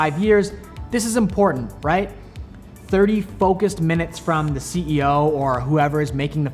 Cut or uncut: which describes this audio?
uncut